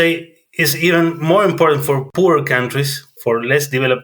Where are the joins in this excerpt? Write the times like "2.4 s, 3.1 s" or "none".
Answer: 2.1 s